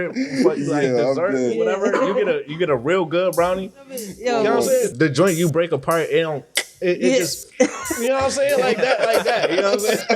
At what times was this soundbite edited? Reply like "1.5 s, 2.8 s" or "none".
4.1 s, 4.9 s